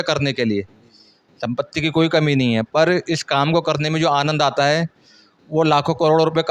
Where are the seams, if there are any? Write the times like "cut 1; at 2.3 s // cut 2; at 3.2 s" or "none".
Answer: none